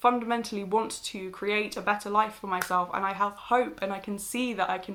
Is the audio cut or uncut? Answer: uncut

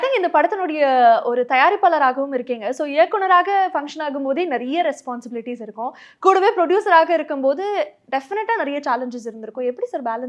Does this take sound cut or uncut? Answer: uncut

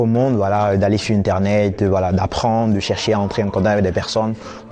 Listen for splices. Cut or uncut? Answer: uncut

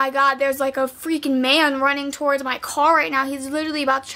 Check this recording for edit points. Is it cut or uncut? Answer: uncut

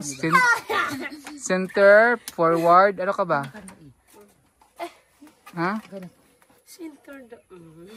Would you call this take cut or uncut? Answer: uncut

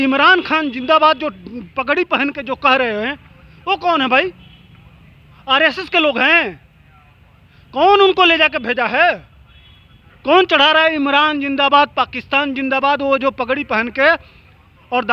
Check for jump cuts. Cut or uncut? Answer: uncut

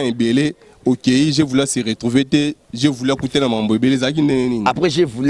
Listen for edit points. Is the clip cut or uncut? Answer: uncut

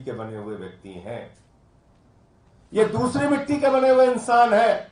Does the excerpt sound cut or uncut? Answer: uncut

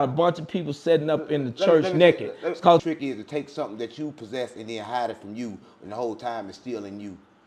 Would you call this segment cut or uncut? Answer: cut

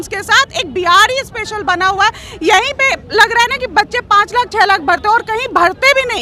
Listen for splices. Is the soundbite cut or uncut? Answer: uncut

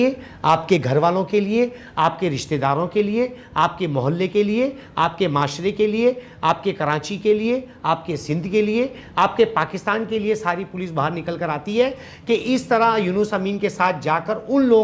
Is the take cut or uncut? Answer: uncut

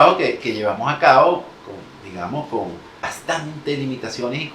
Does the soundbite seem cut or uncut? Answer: cut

